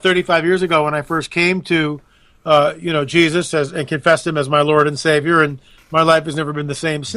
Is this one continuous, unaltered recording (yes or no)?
no